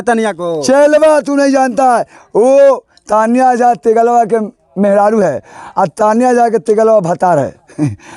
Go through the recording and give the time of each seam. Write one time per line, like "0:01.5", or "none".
none

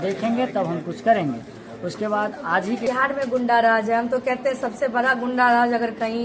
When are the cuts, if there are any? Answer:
0:02.8

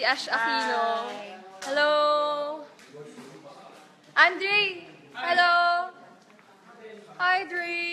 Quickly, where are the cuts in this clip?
none

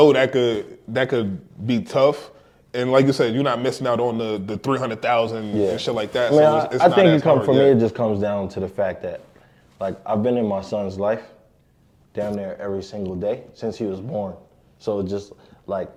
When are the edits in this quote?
none

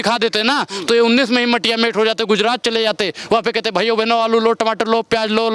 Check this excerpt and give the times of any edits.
none

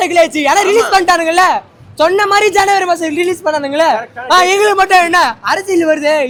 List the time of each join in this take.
none

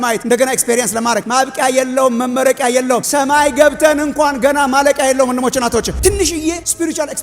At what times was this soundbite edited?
0:05.9

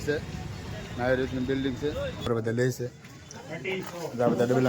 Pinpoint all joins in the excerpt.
0:02.3

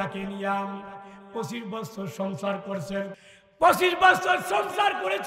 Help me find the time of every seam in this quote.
0:03.2

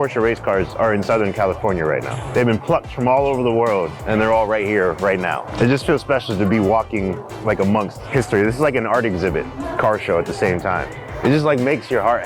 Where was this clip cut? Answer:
0:02.2
0:04.0
0:05.5
0:08.0
0:09.6
0:11.0

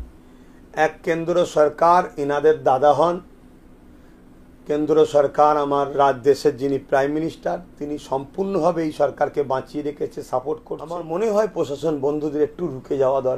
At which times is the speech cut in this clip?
0:11.0

